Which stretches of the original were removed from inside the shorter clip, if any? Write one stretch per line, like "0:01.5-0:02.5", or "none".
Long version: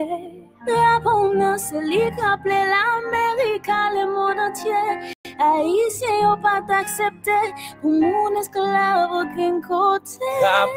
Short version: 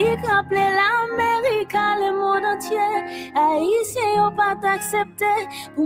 0:05.4-0:05.5

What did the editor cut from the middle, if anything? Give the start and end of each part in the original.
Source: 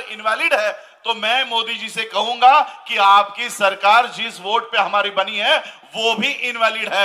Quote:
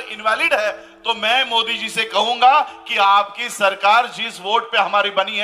none

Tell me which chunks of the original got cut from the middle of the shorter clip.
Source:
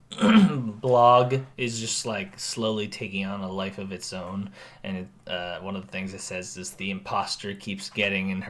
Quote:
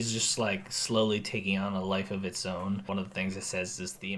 0:04.5-0:05.6

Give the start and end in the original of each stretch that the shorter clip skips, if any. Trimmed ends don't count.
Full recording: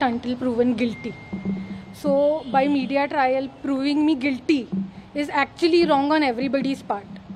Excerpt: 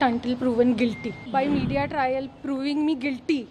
0:01.2-0:02.4

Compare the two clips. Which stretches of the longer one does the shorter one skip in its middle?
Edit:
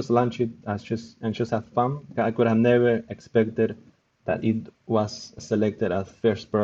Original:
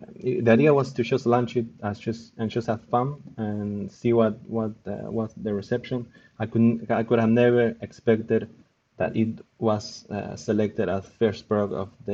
0:03.3-0:06.8
0:10.1-0:10.3

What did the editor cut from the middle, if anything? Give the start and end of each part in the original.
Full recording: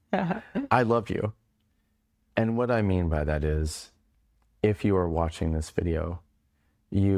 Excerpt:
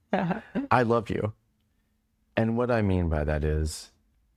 none

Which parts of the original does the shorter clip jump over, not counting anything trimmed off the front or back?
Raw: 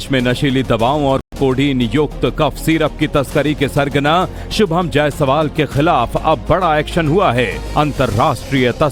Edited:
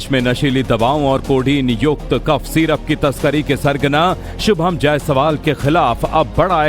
0:01.2-0:01.3

